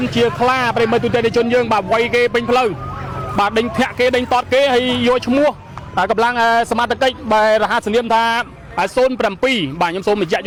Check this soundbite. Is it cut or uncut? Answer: uncut